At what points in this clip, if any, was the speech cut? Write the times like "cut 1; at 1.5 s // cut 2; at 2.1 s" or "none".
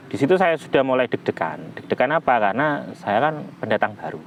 none